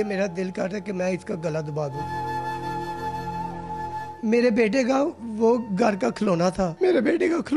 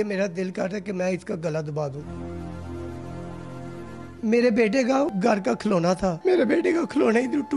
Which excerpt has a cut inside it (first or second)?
second